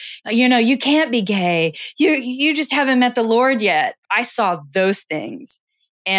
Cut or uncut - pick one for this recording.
cut